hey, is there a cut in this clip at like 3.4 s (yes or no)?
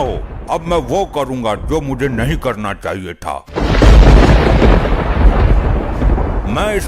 yes